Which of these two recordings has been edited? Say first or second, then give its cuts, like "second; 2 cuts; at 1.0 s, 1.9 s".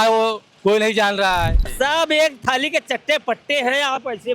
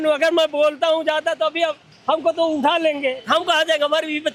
first; 1 cut; at 1.7 s